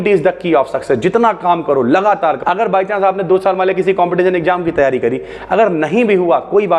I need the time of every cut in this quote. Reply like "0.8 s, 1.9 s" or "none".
2.4 s